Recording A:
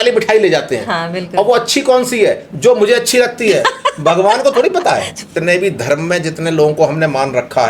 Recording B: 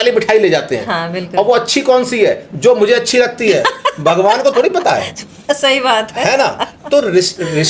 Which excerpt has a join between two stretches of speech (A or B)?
A